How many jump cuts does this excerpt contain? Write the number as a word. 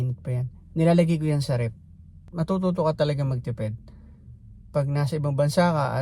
one